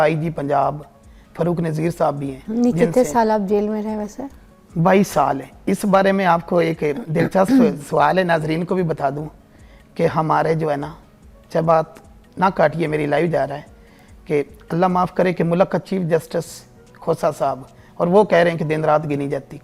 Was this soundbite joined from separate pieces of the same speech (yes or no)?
no